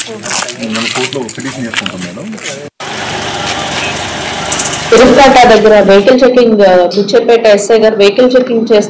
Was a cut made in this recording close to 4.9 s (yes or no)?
yes